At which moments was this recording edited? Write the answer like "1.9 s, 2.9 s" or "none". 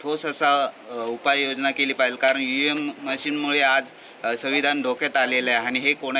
none